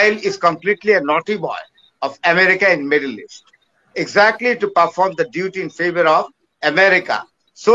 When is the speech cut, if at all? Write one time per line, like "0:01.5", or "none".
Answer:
none